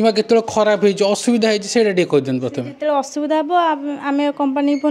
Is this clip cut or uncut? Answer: uncut